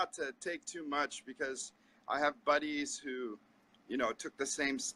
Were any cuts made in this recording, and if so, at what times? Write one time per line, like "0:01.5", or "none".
0:02.4